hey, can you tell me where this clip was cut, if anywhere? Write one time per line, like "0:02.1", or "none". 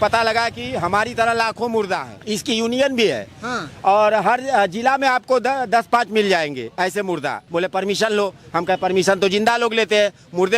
0:02.1
0:07.4